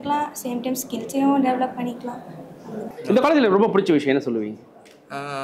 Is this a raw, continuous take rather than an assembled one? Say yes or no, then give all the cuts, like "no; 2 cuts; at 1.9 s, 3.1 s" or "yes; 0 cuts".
no; 1 cut; at 2.8 s